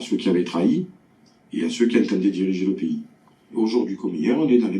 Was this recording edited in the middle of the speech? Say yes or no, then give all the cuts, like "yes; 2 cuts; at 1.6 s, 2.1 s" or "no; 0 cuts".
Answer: yes; 1 cut; at 3.5 s